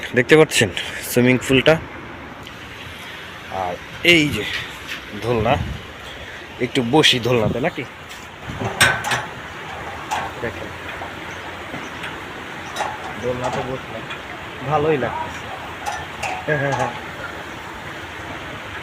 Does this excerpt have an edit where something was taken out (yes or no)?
yes